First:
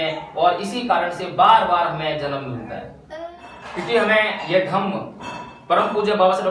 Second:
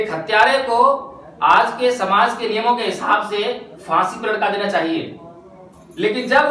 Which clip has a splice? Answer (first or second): first